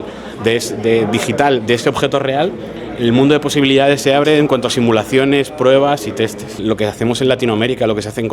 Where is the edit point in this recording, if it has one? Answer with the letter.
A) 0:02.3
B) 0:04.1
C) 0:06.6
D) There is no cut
C